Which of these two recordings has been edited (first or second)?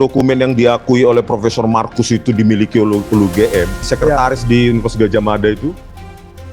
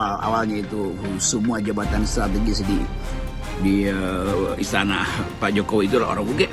first